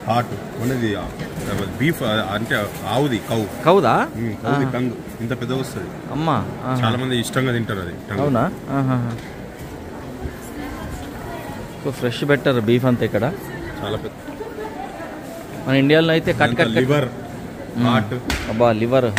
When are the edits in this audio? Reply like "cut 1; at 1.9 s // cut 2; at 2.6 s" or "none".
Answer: cut 1; at 14.1 s